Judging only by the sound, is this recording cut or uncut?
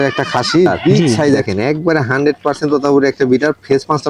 cut